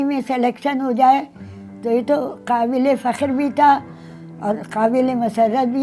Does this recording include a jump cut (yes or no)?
no